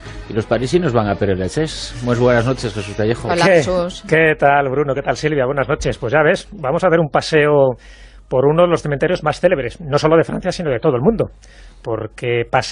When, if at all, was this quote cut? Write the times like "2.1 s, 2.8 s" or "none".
4.6 s